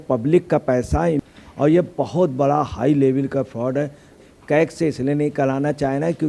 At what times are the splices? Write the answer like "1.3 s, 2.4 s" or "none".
1.2 s, 4.2 s

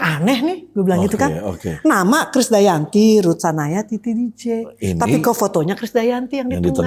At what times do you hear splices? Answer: none

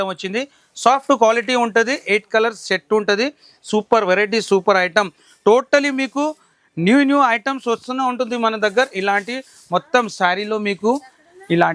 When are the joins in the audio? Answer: none

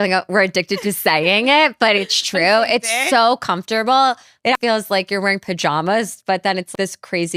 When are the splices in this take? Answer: none

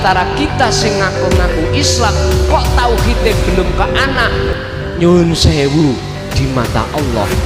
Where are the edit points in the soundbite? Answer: none

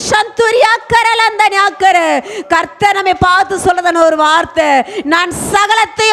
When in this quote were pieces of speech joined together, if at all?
none

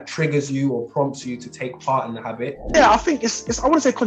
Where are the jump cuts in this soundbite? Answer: 2.7 s

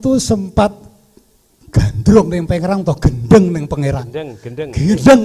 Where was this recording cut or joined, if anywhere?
none

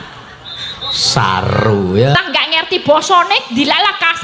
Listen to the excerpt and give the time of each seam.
2.1 s

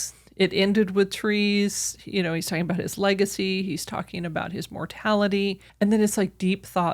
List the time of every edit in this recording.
5.6 s

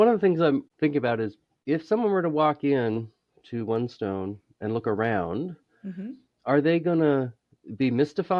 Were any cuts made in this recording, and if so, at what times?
1.5 s

